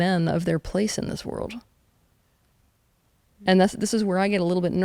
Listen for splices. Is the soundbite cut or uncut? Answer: uncut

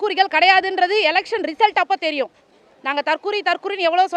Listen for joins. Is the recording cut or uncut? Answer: uncut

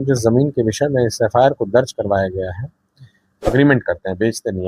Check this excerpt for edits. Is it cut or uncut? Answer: cut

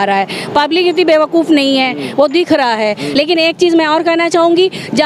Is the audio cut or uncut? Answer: uncut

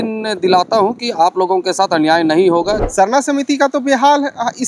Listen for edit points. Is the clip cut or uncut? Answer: cut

